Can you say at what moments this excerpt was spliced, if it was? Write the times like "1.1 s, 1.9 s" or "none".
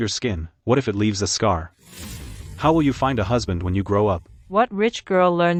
none